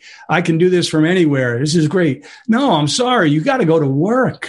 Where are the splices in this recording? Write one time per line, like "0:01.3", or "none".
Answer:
none